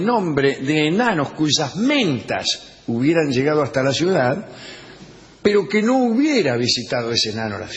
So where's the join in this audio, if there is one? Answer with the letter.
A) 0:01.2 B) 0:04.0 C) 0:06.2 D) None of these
B